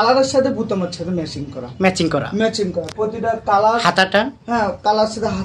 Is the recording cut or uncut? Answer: uncut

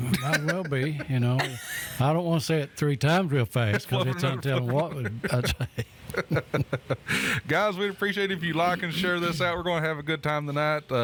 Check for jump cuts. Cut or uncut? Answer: uncut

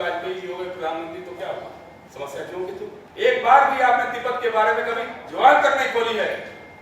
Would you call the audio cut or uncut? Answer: cut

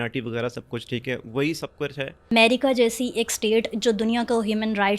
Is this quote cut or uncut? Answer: cut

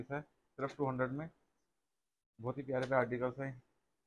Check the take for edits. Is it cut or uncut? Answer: uncut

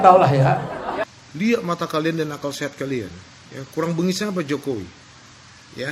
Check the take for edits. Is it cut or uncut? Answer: cut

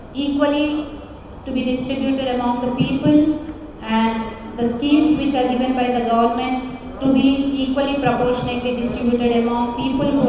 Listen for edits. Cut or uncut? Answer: uncut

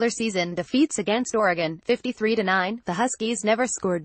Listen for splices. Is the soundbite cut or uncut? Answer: uncut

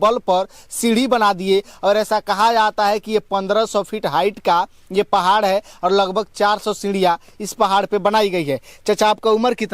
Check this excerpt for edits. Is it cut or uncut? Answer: uncut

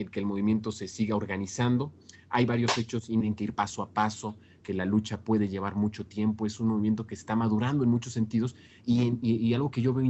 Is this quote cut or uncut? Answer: uncut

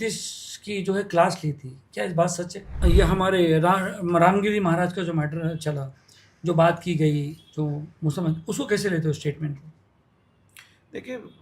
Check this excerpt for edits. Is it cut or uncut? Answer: cut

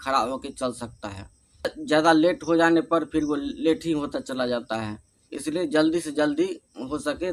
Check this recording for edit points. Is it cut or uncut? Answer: uncut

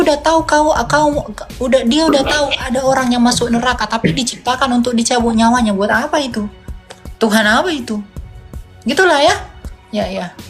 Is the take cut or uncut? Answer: uncut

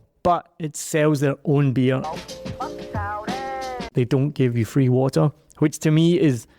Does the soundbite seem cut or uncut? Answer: cut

